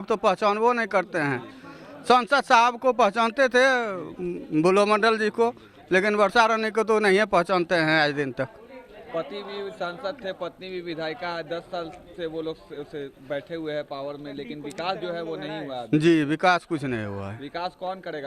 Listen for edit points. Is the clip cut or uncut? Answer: uncut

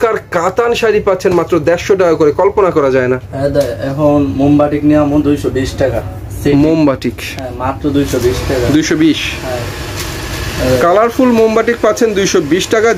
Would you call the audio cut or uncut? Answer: uncut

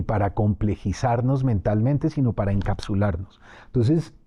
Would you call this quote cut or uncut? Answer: uncut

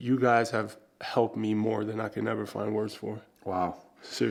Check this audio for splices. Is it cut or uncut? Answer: uncut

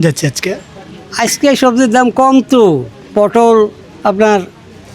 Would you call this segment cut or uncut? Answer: cut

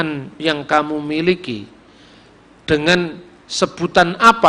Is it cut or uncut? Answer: uncut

